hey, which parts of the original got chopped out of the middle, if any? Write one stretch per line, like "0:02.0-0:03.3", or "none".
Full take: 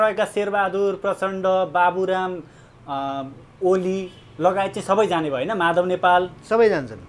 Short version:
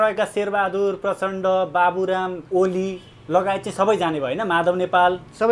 0:02.4-0:03.5

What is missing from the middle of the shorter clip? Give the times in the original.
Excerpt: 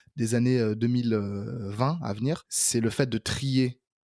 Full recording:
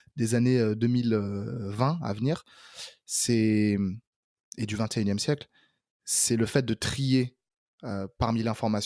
0:02.5-0:06.1

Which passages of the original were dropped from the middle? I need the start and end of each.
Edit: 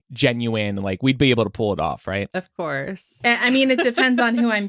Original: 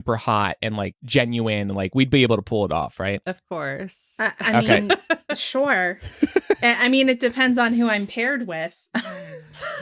0:04.1-0:06.6

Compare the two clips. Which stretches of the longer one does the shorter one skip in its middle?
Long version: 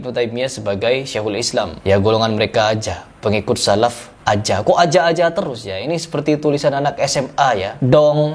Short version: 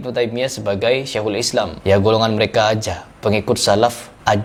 none

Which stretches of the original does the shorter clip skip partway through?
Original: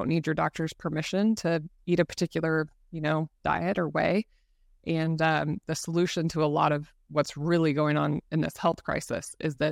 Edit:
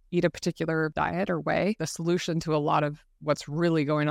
0:02.7-0:03.4
0:04.4-0:05.8

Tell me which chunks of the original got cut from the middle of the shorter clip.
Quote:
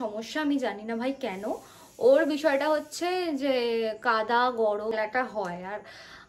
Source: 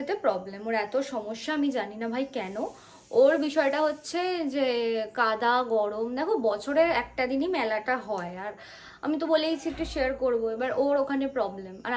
0:06.1-0:07.7

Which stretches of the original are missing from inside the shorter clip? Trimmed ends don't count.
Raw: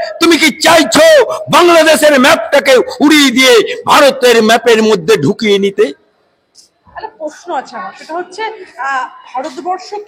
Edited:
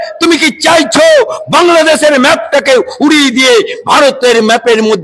none

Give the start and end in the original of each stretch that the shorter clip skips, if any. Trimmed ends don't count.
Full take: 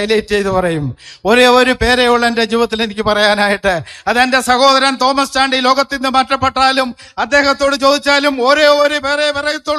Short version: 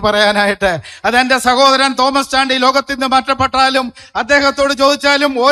none

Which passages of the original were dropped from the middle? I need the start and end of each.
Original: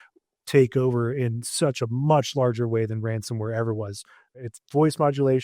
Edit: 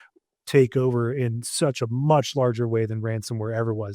none

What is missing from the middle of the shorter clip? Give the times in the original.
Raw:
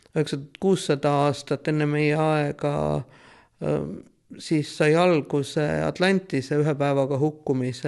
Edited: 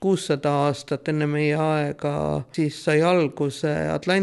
0:03.1-0:04.4

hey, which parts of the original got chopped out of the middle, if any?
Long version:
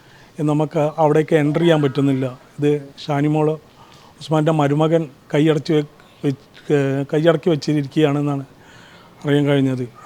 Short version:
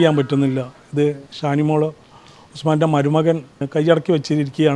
0:05.3-0:07.0

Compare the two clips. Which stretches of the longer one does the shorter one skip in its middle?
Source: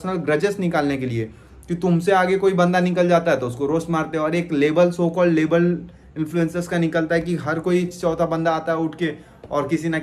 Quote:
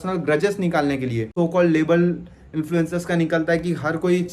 0:01.3-0:04.9

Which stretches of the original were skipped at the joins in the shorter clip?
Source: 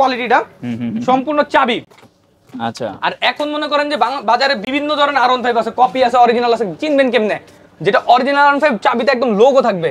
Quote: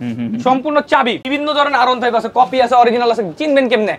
0:01.8-0:04.6

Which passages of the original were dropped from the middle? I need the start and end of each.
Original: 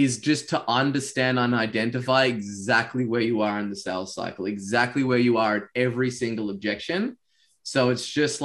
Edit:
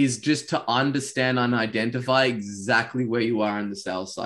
none

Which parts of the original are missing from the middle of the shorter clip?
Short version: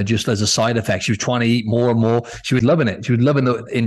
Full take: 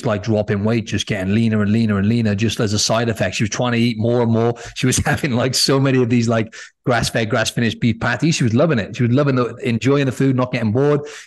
0:04.9-0:08.5

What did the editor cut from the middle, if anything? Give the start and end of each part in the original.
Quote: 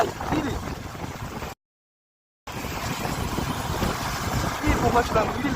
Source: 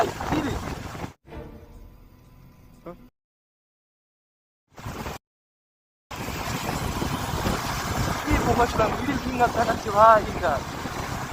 0:01.1-0:04.8

